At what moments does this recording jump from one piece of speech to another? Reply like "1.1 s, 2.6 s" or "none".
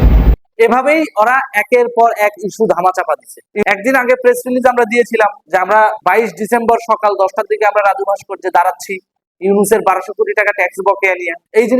3.6 s